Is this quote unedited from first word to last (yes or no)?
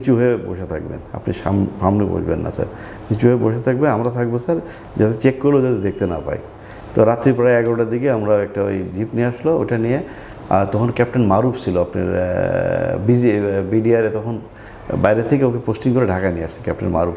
yes